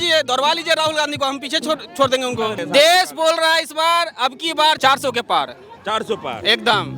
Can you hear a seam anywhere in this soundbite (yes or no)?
yes